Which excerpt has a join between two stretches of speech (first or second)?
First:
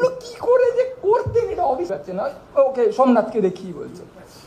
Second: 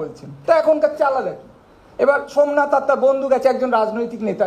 first